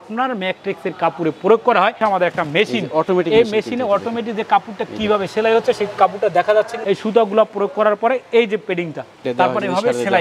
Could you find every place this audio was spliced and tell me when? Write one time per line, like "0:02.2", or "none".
0:01.9
0:06.8
0:09.2